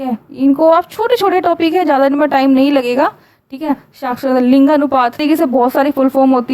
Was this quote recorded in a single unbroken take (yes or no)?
no